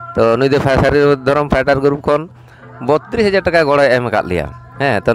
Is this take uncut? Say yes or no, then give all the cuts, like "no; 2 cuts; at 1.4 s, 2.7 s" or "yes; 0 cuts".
yes; 0 cuts